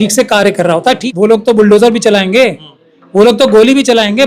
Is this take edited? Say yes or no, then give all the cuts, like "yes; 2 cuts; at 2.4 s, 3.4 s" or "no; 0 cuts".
yes; 1 cut; at 1.0 s